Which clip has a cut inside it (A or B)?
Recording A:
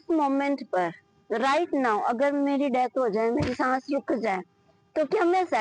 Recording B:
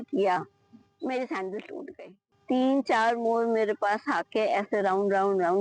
B